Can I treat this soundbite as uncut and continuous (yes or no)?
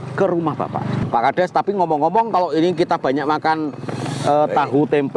no